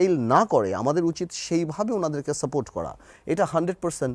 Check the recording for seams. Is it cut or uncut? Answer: uncut